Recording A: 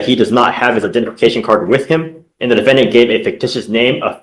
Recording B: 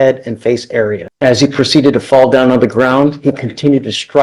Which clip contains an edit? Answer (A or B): B